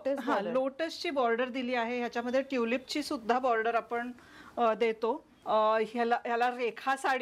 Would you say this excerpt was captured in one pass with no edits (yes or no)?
no